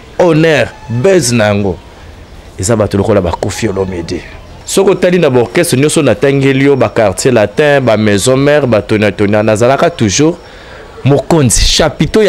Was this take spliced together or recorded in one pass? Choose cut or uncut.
cut